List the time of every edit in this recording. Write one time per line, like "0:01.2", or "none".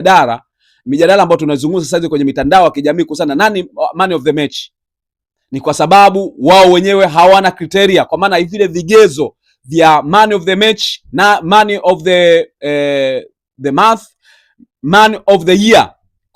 none